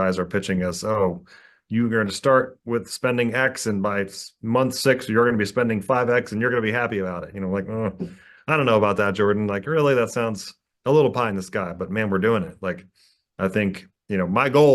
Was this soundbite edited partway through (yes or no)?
no